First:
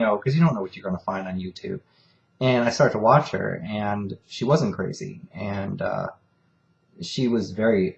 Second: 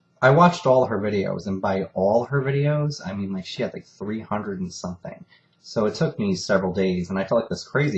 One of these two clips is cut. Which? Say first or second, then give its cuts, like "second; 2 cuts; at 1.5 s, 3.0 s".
second; 1 cut; at 3.0 s